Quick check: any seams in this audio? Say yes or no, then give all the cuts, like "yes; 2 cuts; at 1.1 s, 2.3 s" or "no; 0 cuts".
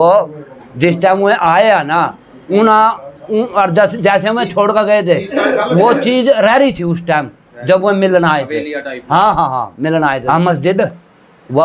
yes; 1 cut; at 10.2 s